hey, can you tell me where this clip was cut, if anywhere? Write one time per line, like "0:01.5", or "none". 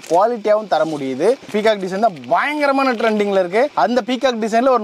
0:01.5